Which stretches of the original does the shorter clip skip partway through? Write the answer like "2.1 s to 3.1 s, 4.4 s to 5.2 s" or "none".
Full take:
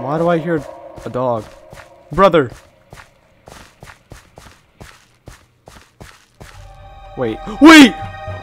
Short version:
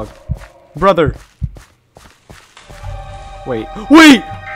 2.8 s to 5.1 s